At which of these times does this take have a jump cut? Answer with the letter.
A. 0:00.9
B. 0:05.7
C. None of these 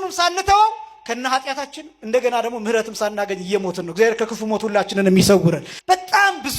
B